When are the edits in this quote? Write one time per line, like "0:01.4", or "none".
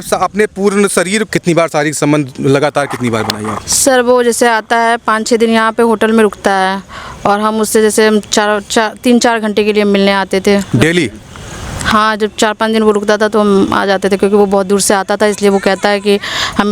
0:01.3